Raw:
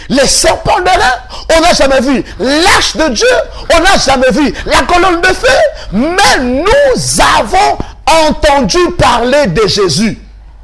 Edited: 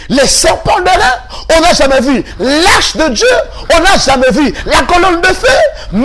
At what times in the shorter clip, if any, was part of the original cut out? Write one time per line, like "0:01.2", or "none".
none